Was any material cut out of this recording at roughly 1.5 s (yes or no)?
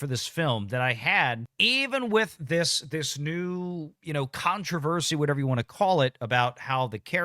yes